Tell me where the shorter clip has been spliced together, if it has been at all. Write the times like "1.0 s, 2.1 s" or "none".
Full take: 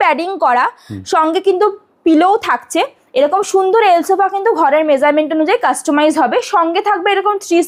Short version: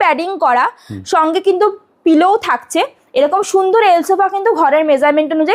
none